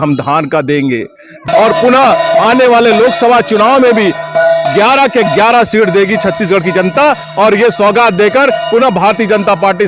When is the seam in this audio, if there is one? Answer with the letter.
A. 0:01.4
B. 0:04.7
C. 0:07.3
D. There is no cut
A